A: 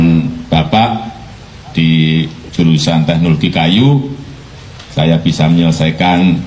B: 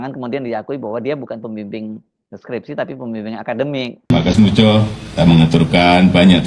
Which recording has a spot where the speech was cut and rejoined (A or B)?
B